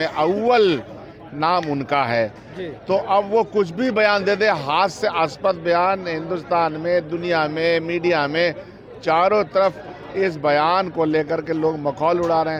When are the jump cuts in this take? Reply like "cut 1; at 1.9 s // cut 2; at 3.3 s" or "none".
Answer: none

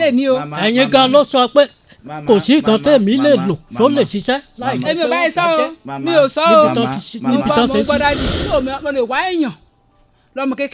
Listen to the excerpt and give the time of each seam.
cut 1; at 8.3 s

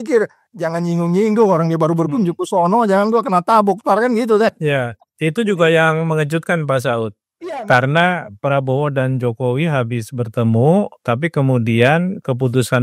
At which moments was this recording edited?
none

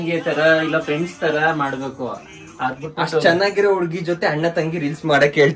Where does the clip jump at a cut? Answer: none

